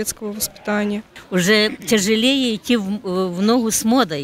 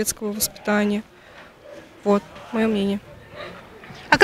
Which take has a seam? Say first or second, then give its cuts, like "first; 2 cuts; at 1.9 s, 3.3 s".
first; 1 cut; at 1.1 s